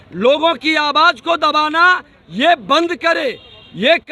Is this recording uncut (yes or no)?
yes